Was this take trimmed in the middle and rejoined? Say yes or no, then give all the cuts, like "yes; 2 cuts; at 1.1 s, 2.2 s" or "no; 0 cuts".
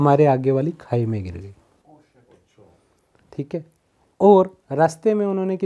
no; 0 cuts